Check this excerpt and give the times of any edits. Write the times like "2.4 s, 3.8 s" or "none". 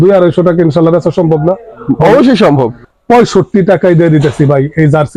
2.8 s